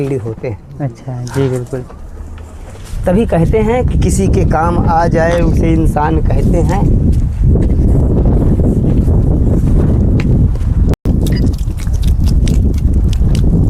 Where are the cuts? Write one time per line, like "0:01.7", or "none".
none